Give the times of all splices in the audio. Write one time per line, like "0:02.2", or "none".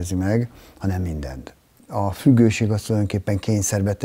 0:01.8